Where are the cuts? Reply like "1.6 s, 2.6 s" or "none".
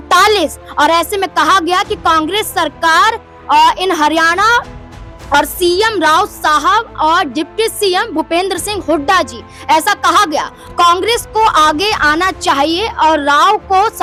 none